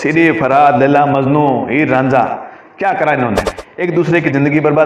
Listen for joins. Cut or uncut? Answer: cut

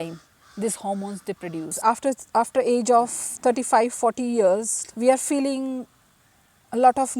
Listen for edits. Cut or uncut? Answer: cut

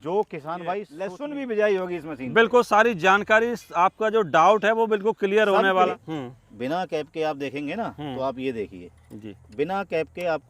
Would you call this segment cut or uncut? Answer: cut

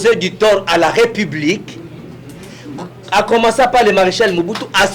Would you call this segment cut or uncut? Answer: uncut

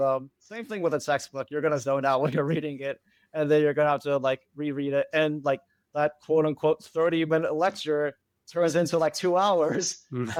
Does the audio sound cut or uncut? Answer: uncut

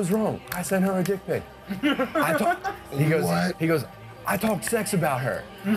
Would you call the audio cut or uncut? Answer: uncut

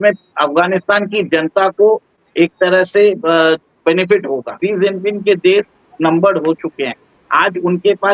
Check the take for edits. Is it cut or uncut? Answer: cut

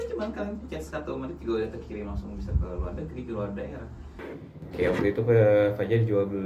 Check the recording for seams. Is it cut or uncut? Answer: cut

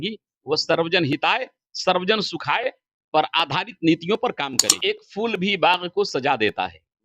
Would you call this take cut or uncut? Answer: cut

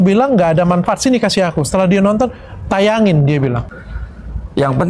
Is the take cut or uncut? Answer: cut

